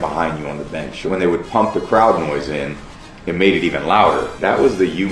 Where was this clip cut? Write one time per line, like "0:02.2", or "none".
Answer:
0:01.0
0:04.3

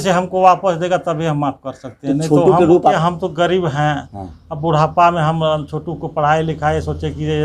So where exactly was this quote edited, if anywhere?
0:02.9

